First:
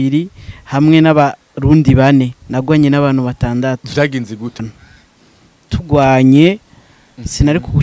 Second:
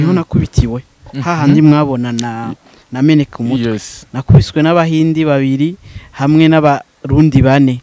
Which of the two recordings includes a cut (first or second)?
first